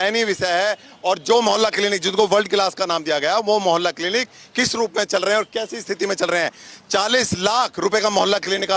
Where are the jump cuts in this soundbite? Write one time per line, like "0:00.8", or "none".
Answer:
none